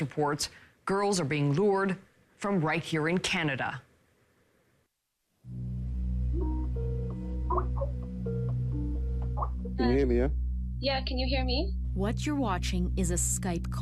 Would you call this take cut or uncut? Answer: uncut